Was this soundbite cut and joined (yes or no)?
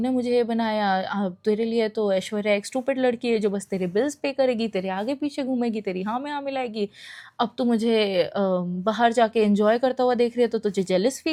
no